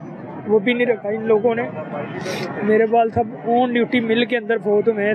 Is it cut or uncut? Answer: uncut